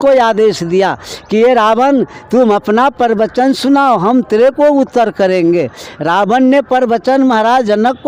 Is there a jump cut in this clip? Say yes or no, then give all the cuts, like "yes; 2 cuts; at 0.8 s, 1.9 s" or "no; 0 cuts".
no; 0 cuts